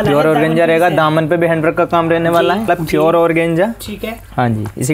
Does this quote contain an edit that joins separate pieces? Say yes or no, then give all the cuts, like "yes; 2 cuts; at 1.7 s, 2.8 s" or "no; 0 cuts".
yes; 1 cut; at 2.7 s